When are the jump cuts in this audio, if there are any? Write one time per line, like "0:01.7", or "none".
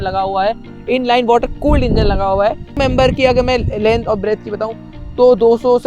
0:02.8